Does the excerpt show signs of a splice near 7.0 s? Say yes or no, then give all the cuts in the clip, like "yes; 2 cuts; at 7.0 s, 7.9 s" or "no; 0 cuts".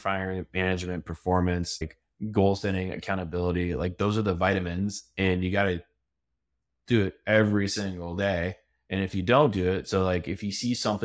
no; 1 cut; at 2.0 s